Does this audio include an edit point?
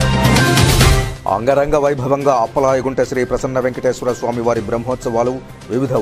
no; 0 cuts

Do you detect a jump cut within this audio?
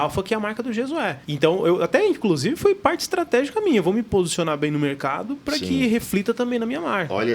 yes; 1 cut; at 1.2 s

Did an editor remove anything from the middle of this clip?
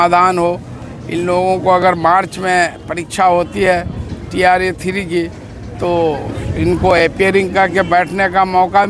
no; 0 cuts

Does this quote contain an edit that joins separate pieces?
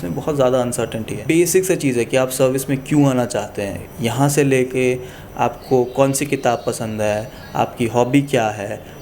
yes; 1 cut; at 1.1 s

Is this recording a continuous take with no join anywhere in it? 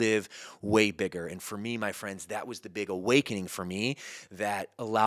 yes; 0 cuts

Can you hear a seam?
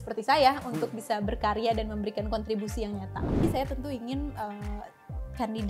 yes; 1 cut; at 3.4 s

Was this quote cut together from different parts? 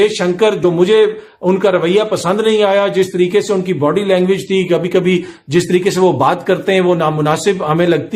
no; 0 cuts

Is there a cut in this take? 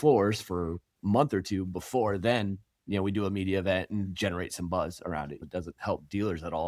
yes; 1 cut; at 5.4 s

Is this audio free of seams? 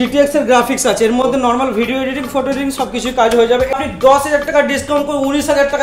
no; 1 cut; at 3.7 s

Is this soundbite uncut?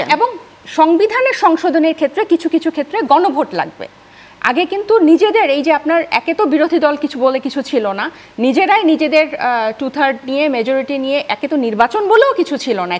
yes; 0 cuts

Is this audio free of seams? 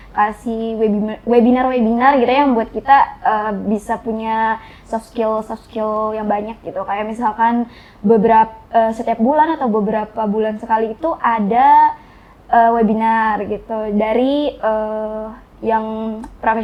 yes; 0 cuts

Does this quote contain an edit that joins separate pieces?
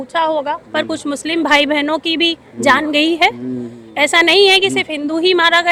no; 0 cuts

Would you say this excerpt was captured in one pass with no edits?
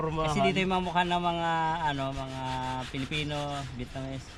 yes; 0 cuts

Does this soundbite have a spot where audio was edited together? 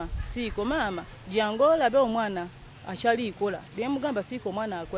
no; 0 cuts

